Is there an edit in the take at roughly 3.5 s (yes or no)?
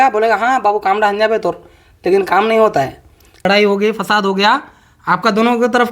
yes